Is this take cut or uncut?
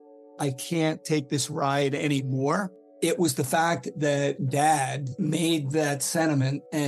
uncut